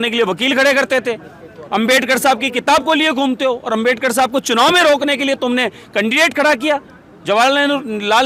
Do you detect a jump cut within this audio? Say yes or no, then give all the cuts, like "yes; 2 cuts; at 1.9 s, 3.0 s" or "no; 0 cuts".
no; 0 cuts